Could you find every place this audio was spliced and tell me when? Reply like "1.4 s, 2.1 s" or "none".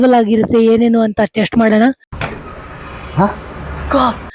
none